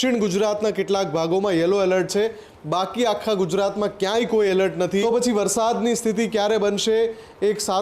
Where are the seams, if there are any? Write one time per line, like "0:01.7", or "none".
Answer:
0:05.0